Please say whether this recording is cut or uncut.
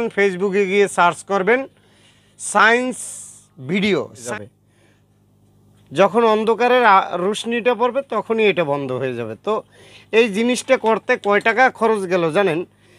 cut